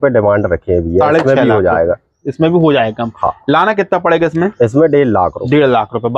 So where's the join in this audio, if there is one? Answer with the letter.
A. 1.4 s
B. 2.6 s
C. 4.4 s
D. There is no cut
D